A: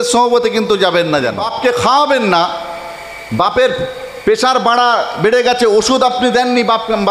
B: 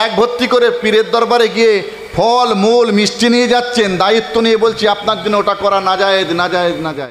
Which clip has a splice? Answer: A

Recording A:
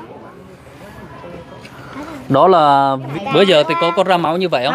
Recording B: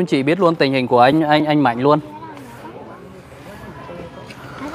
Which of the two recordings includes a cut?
A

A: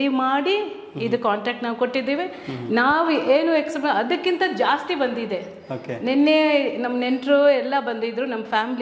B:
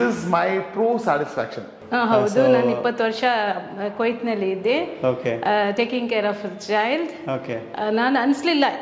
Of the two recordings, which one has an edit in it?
B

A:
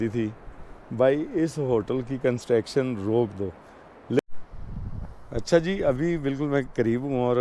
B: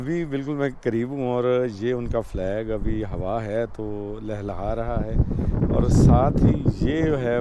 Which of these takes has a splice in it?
A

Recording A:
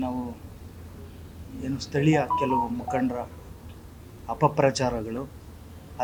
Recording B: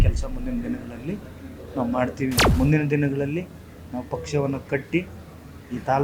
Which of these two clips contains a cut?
B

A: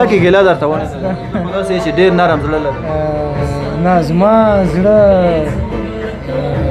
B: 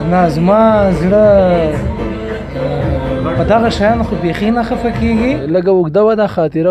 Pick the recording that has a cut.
B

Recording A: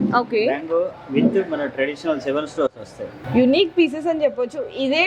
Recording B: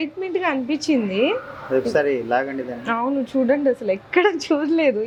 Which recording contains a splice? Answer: A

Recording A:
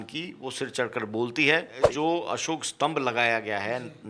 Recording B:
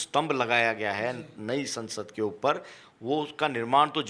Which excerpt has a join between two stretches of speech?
A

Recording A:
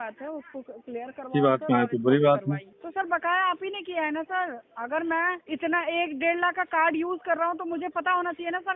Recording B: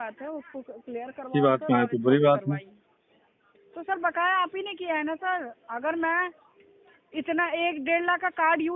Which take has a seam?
A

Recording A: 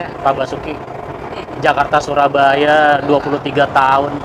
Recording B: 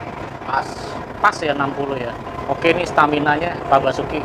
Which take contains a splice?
B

